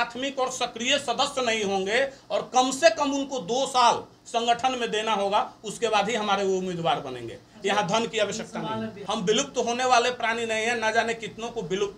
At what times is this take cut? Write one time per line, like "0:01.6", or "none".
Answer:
0:09.0